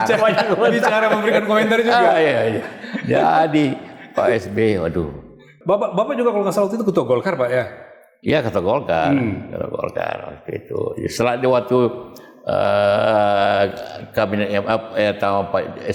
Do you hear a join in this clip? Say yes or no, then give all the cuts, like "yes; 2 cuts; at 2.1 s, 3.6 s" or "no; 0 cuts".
no; 0 cuts